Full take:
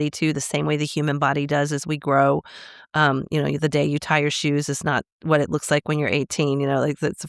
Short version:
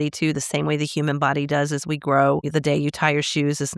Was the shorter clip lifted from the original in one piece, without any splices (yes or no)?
no